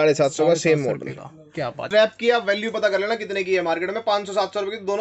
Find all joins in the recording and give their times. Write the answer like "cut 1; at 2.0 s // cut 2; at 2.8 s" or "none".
cut 1; at 1.9 s